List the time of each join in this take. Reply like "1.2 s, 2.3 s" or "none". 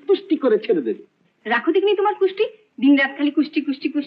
none